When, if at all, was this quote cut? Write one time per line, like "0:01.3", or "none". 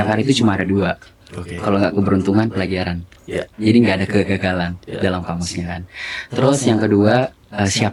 none